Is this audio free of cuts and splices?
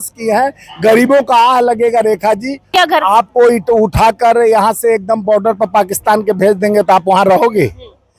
no; 1 cut; at 2.7 s

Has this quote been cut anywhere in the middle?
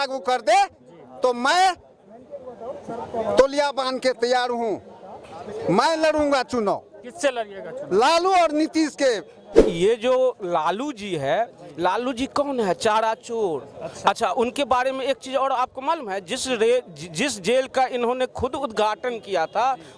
yes; 1 cut; at 9.6 s

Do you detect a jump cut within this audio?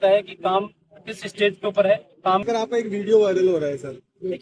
yes; 1 cut; at 2.5 s

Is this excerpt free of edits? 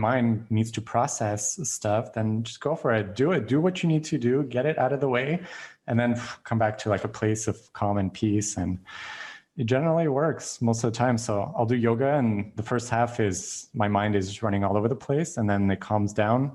yes; 0 cuts

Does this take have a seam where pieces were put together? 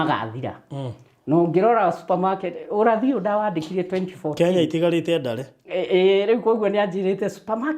no; 0 cuts

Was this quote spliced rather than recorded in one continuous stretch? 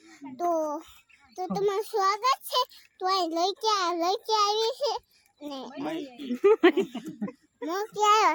no; 0 cuts

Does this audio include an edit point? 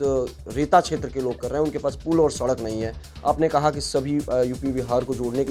no; 0 cuts

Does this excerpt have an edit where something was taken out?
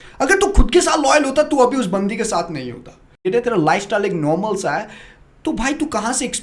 yes; 1 cut; at 3.2 s

